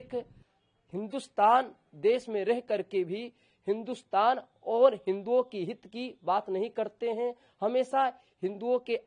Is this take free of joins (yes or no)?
yes